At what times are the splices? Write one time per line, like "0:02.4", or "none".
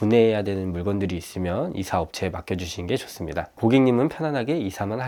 none